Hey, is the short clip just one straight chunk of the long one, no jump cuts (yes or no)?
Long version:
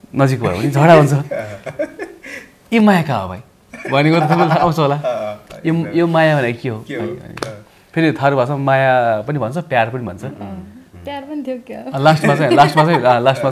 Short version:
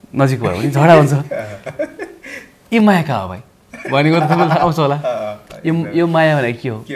yes